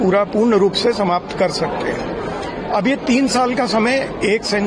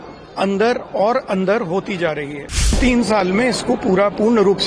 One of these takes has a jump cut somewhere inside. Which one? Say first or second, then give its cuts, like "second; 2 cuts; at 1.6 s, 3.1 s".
second; 1 cut; at 2.8 s